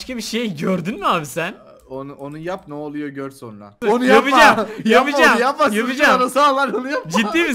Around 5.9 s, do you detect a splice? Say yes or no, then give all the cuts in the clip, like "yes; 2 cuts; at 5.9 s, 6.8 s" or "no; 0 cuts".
no; 1 cut; at 3.8 s